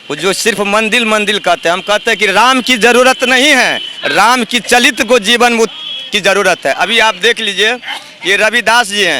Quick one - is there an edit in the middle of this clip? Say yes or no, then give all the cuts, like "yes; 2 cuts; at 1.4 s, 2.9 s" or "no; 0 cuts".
no; 0 cuts